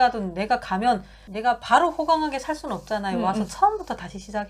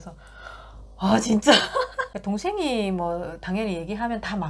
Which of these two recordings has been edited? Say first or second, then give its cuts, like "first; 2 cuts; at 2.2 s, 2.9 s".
second; 1 cut; at 1.9 s